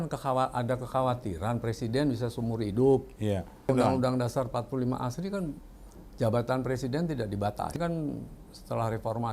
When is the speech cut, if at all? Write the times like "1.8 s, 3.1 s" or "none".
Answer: 3.6 s, 7.8 s